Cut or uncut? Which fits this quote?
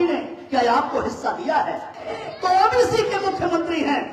cut